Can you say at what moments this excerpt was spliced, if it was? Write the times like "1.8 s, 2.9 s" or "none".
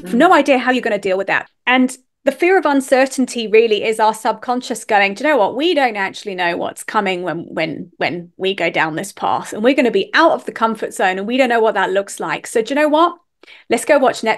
1.4 s